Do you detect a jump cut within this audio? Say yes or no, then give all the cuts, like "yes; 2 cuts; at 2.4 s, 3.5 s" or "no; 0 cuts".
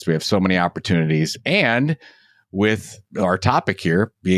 yes; 1 cut; at 3.1 s